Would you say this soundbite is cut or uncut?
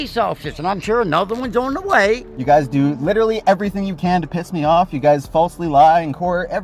cut